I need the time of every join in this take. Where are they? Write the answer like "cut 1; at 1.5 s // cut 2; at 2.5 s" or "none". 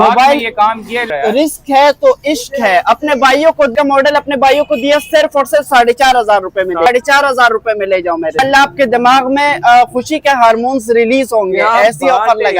cut 1; at 1.1 s // cut 2; at 3.7 s // cut 3; at 6.9 s // cut 4; at 8.4 s